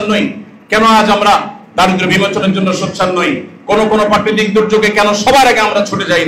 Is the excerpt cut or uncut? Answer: uncut